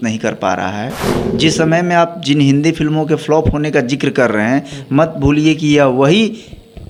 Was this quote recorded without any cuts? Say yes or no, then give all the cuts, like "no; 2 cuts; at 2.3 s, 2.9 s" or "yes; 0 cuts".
yes; 0 cuts